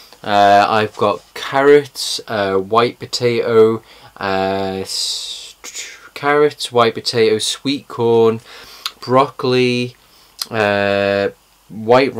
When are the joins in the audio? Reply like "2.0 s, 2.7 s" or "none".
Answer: 2.2 s